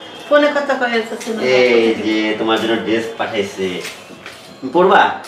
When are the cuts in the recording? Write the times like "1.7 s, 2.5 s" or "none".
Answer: none